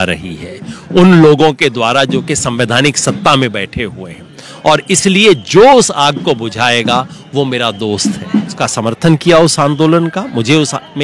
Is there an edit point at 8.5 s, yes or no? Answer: yes